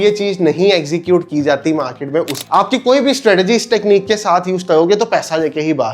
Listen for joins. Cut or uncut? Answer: cut